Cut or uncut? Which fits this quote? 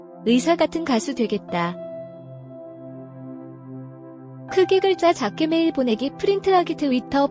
cut